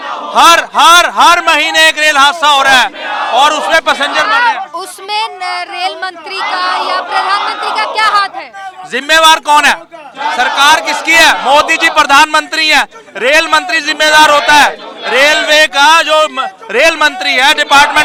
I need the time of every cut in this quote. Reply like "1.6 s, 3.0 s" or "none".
none